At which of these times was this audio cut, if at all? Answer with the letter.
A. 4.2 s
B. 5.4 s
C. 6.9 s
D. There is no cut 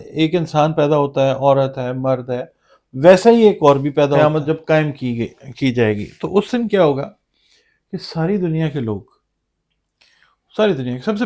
A